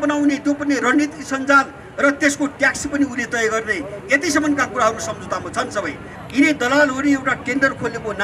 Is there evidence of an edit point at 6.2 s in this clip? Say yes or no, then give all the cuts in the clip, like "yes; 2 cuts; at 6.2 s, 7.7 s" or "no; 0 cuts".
yes; 1 cut; at 6.2 s